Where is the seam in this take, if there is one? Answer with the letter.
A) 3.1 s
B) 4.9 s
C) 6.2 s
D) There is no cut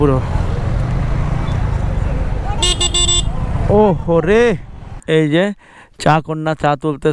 B